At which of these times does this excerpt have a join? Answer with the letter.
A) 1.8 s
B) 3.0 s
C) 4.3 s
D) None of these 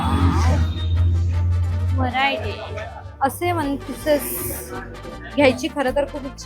B